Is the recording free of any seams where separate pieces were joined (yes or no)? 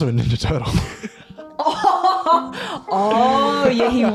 yes